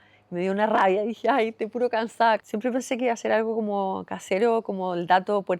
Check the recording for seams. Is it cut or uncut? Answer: cut